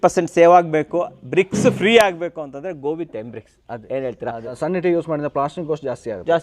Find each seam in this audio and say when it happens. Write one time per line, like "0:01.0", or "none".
0:04.5